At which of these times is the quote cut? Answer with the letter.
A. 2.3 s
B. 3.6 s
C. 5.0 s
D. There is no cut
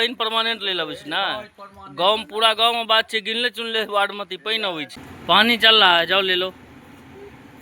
C